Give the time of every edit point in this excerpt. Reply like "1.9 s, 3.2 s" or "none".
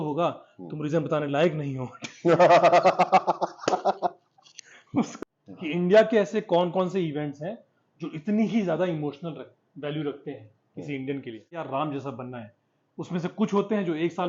5.1 s, 11.6 s